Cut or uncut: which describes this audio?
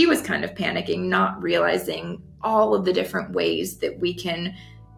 uncut